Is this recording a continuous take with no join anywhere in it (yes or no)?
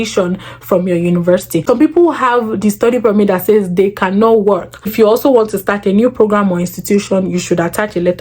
no